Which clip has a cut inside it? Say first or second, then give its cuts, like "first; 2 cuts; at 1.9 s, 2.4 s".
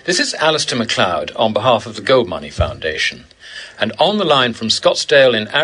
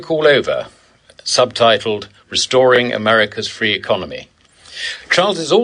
second; 1 cut; at 3.1 s